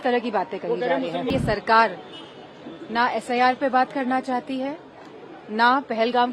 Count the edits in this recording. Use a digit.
1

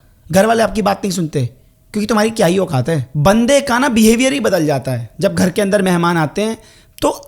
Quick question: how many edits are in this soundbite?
1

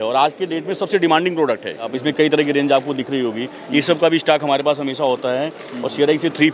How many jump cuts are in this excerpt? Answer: 1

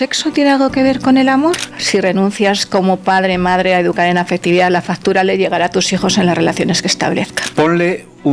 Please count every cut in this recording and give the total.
2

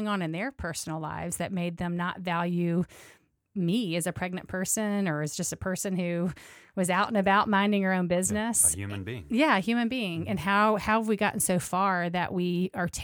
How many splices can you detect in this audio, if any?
0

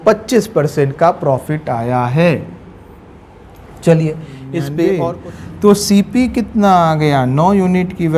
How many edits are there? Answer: 1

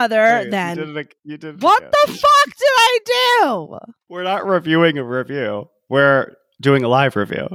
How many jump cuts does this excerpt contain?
1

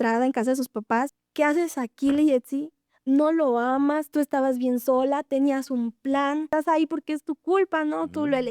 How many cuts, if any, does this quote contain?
2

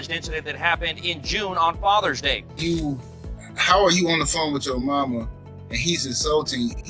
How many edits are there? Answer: 1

